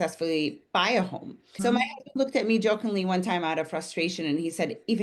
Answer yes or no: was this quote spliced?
yes